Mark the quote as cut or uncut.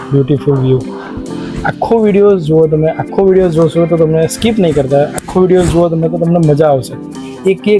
uncut